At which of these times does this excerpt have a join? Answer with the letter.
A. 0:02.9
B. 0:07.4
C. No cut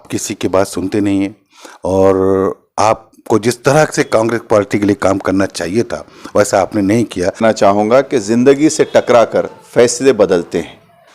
B